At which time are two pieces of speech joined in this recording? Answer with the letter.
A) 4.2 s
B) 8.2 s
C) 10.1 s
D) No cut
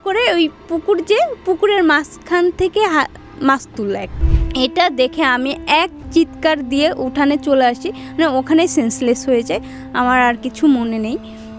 A